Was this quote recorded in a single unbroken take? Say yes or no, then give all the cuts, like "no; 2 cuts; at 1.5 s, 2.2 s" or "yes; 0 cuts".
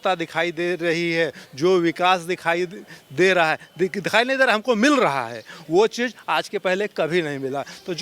yes; 0 cuts